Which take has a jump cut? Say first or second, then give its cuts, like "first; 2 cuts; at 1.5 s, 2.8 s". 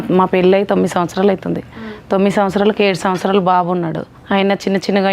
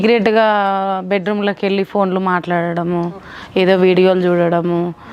first; 1 cut; at 4.1 s